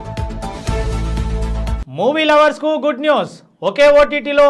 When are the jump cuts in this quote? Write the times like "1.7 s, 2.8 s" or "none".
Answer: 1.8 s